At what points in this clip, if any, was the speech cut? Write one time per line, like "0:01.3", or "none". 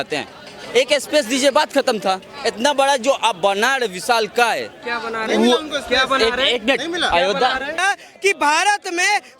0:07.8